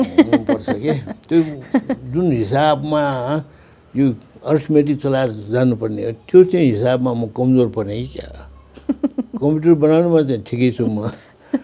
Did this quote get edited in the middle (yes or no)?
no